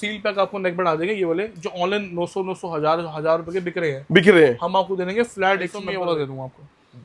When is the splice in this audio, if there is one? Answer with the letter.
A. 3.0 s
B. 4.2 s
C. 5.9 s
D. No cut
C